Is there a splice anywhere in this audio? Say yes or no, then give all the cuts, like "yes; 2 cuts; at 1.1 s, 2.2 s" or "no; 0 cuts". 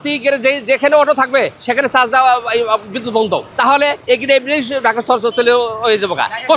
no; 0 cuts